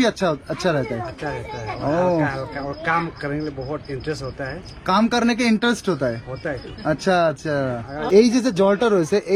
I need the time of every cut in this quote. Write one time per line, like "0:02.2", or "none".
0:08.0